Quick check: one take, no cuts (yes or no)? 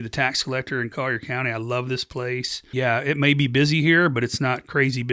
no